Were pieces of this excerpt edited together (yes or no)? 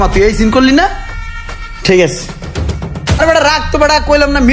yes